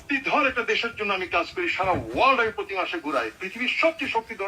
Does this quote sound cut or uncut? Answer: uncut